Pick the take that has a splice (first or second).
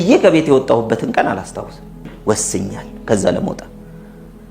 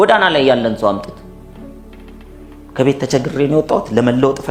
first